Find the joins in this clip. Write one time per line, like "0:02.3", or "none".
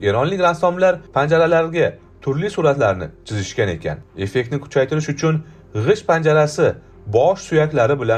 none